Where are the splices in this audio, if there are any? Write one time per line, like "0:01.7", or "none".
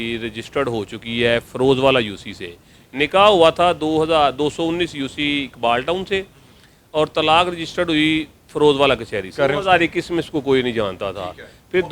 0:09.3

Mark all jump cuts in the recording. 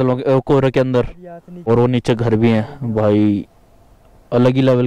none

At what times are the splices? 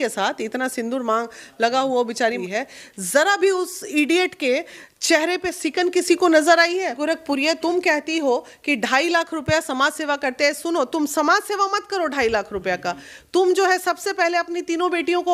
0:02.4
0:07.0

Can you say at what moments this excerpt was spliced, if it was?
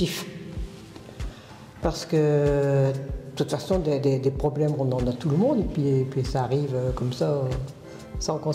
none

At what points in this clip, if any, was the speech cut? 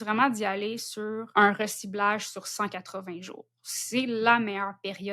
0:01.3

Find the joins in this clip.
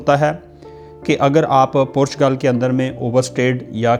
none

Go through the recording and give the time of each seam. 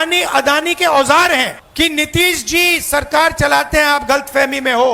0:01.6

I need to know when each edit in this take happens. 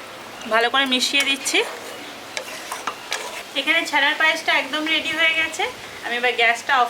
0:03.4

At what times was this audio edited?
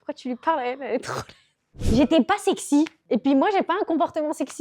0:01.8
0:03.0

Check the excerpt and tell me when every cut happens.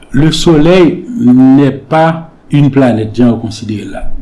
0:02.3

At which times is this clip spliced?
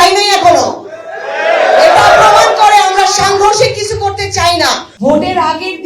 0:04.9

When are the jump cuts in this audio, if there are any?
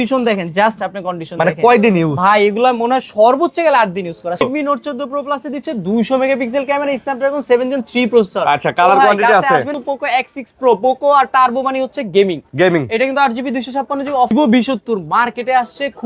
0:04.4
0:09.7
0:14.3

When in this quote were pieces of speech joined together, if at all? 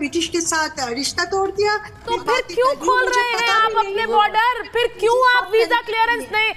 0:02.1

